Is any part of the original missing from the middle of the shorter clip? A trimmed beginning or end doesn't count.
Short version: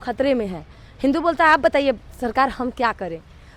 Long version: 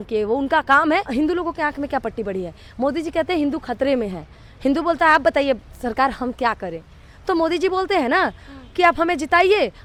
no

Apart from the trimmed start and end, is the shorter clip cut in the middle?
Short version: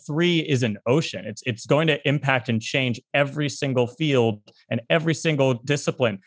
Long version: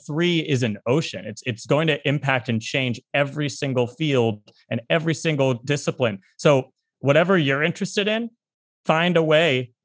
no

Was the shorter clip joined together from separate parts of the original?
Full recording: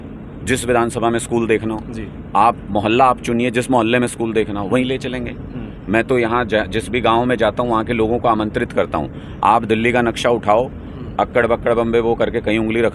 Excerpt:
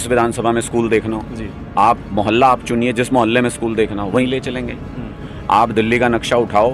yes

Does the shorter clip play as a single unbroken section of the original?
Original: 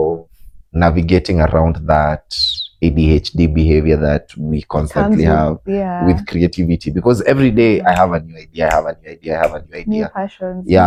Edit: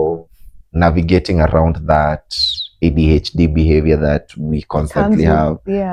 yes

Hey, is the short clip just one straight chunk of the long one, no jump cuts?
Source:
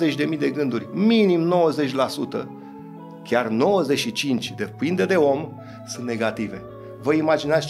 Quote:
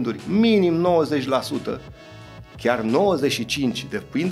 yes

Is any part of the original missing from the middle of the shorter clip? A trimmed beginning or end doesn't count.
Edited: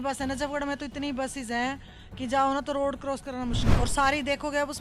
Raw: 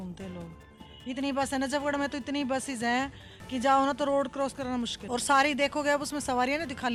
no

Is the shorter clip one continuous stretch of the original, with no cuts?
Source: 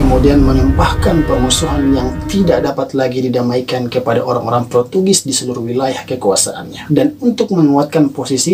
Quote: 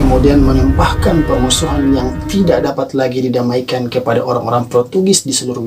yes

